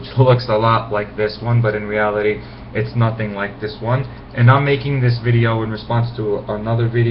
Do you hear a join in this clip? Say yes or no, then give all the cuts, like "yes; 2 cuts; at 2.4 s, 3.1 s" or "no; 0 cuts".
yes; 1 cut; at 4.0 s